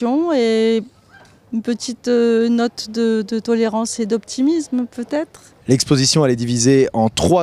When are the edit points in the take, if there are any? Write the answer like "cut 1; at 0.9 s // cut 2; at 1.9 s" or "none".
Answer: cut 1; at 4.0 s